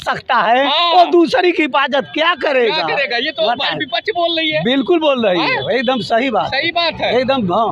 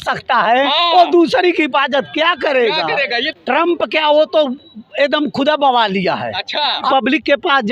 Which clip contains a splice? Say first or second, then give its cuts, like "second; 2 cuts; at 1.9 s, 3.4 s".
second; 2 cuts; at 3.2 s, 6.9 s